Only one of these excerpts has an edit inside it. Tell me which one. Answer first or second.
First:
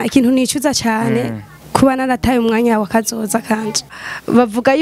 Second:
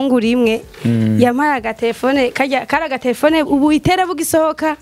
first